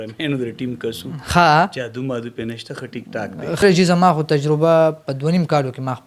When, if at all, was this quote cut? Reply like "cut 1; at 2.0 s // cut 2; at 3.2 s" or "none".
cut 1; at 3.6 s